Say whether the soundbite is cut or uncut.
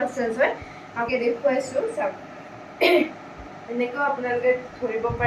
cut